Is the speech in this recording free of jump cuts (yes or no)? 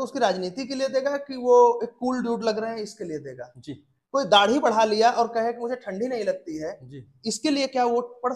yes